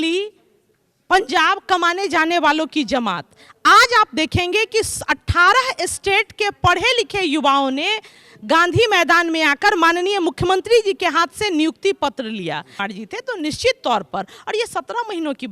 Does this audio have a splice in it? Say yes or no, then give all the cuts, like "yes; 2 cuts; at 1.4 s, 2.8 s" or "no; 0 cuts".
yes; 1 cut; at 12.9 s